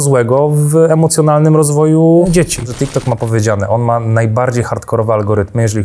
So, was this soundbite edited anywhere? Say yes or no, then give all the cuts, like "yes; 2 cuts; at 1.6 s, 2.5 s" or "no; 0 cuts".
yes; 1 cut; at 2.7 s